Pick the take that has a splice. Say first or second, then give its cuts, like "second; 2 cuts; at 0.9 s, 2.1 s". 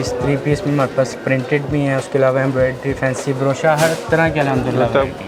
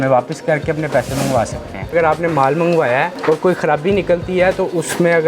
second; 2 cuts; at 1.9 s, 3.1 s